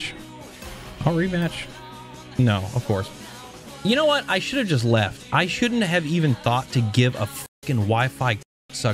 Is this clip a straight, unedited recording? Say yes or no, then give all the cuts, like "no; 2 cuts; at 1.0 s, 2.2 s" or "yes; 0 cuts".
yes; 0 cuts